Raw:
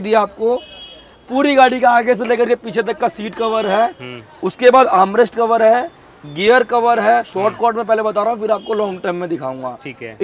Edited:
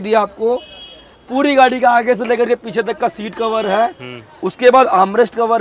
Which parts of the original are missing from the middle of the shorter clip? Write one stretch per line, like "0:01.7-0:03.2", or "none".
none